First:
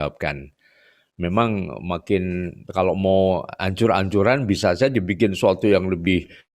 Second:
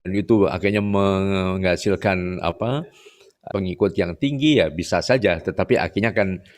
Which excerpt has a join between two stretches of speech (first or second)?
second